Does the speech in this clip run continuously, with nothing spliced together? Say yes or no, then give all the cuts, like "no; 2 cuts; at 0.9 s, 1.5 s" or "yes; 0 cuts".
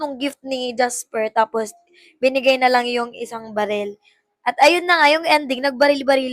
yes; 0 cuts